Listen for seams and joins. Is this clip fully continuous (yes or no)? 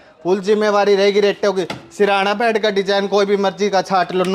yes